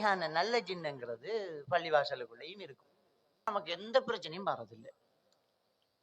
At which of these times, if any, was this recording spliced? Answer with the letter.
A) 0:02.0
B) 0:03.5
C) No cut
B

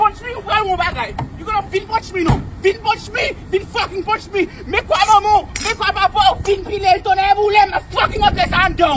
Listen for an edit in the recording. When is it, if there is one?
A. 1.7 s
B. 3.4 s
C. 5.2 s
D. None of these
A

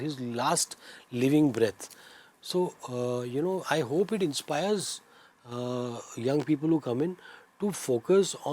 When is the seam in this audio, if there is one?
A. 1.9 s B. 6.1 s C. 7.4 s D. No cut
D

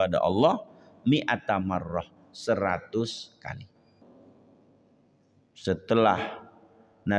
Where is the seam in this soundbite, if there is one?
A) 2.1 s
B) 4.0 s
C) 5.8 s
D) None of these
B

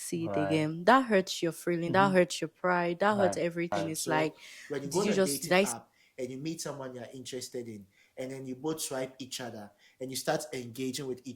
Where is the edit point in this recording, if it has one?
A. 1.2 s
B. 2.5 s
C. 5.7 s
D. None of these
C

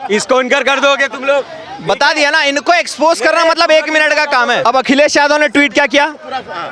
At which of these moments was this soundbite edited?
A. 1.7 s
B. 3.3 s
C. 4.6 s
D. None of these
C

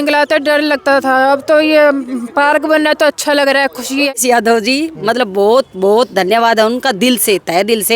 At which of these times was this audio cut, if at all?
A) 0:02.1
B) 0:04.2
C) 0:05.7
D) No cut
B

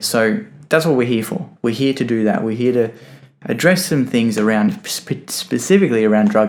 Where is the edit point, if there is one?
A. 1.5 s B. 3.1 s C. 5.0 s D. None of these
D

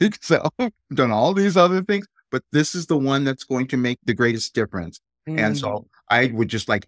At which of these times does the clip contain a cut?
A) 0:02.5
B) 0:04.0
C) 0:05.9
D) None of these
B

